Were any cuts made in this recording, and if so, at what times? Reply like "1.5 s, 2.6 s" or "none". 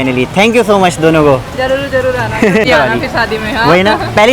2.6 s